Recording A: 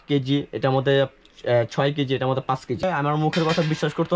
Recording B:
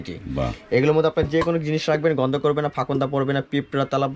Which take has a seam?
A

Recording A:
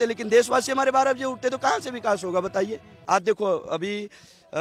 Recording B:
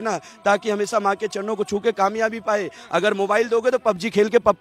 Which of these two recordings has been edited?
A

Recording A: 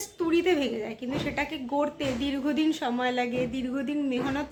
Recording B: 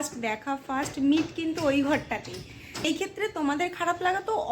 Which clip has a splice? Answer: B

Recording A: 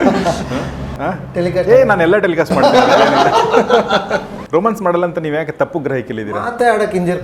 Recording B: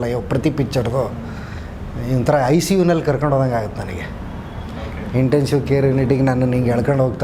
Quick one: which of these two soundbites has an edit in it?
A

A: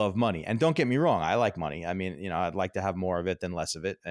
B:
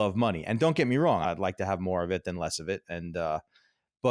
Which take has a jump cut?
B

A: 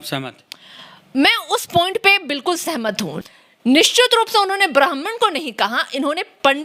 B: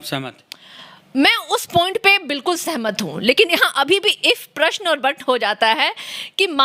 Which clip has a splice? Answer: A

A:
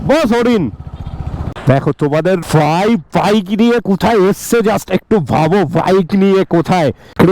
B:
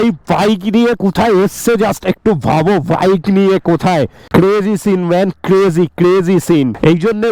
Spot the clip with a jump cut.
A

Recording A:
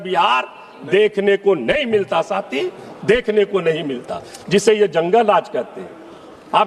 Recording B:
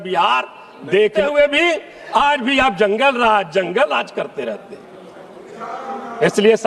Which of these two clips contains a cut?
B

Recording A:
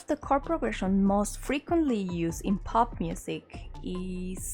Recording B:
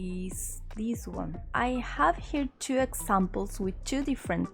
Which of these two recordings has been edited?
B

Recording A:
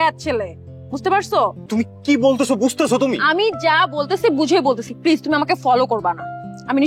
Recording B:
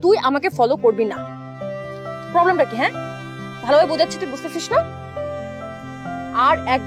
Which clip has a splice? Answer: A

